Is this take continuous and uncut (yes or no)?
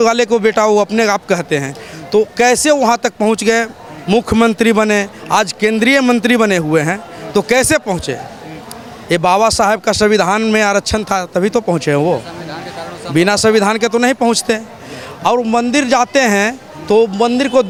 yes